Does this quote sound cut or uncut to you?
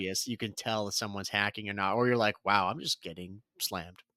uncut